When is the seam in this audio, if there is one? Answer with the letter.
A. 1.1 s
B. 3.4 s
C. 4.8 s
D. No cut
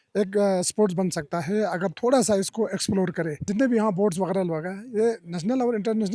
B